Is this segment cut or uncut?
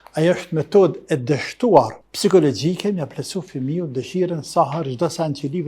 cut